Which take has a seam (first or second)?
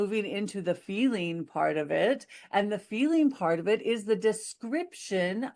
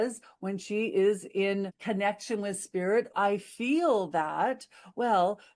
second